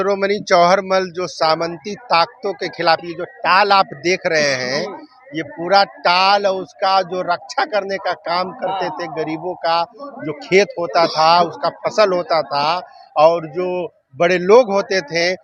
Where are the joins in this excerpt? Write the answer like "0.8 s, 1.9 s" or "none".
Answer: none